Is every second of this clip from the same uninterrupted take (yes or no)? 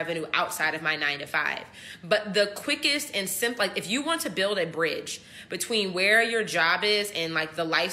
yes